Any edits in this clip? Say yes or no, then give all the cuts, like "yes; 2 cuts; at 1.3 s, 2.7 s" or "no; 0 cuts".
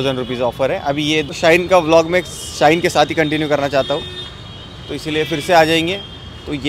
yes; 1 cut; at 1.3 s